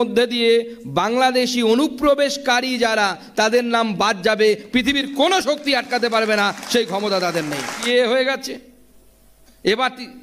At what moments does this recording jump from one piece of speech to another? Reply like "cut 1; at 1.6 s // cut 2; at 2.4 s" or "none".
cut 1; at 7.8 s